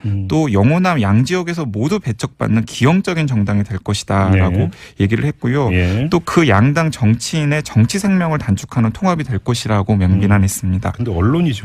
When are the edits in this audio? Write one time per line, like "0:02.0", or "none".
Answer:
0:04.6